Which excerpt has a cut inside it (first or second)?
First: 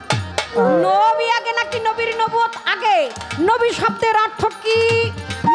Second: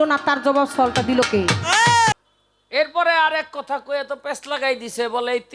second